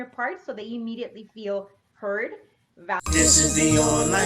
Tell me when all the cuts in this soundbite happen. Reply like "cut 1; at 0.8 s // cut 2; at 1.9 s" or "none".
cut 1; at 3.0 s